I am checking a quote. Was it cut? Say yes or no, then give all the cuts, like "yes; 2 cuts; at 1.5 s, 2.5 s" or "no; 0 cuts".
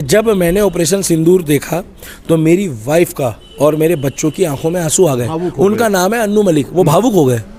no; 0 cuts